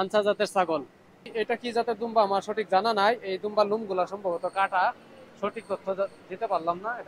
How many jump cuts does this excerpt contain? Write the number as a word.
one